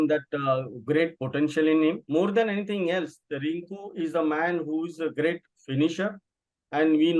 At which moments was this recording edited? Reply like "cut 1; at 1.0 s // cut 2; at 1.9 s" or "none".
cut 1; at 2.0 s

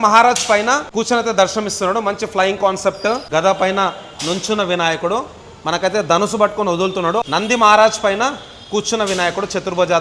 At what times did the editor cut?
cut 1; at 0.9 s // cut 2; at 3.2 s // cut 3; at 7.2 s

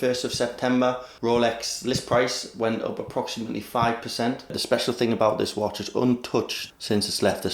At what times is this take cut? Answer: cut 1; at 1.1 s // cut 2; at 4.6 s

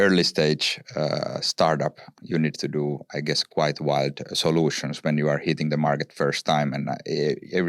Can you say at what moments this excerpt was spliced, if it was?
cut 1; at 2.1 s

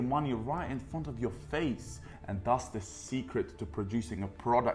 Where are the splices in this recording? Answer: cut 1; at 2.1 s

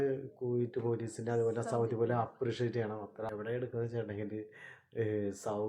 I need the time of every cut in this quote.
cut 1; at 3.3 s

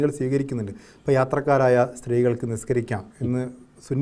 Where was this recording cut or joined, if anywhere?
none

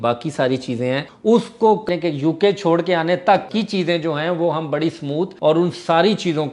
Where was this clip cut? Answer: cut 1; at 1.1 s // cut 2; at 1.9 s // cut 3; at 3.5 s // cut 4; at 5.3 s

